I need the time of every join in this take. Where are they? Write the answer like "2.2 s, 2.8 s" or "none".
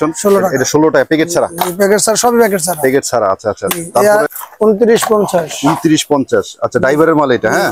4.3 s

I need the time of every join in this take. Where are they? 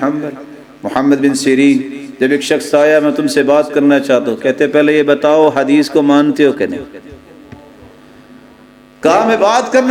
none

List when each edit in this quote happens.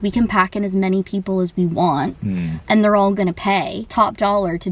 3.8 s

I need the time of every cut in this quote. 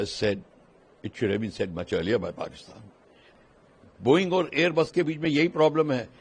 3.2 s

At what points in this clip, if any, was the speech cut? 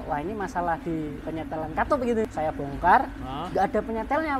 2.3 s

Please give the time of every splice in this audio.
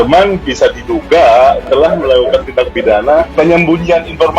3.3 s

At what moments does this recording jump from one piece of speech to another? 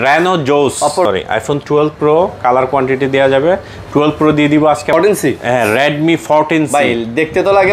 1.1 s, 4.9 s

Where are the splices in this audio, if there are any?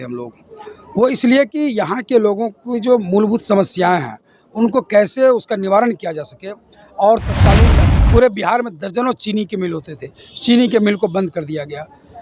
7.8 s

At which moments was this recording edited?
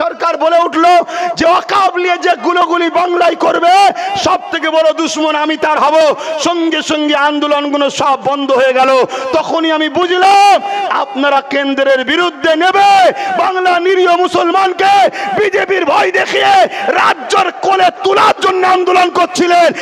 none

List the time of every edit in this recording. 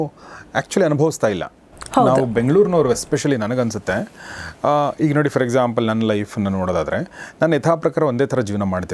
none

